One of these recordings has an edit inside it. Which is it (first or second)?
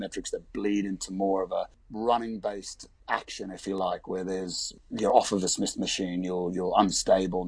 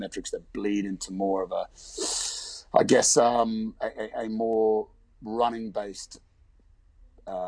first